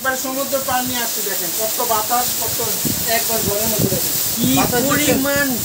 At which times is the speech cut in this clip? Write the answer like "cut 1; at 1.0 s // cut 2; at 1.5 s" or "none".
none